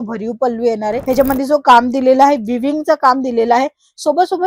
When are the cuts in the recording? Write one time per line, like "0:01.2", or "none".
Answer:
0:01.0